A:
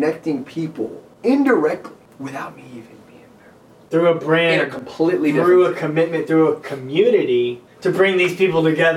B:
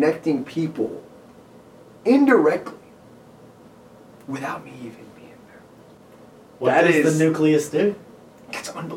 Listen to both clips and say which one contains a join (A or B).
A